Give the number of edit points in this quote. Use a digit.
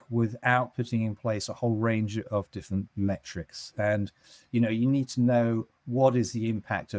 0